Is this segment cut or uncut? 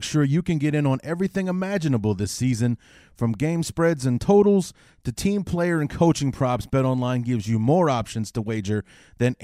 uncut